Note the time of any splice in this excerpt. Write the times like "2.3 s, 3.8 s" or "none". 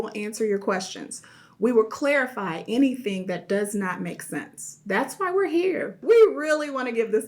5.9 s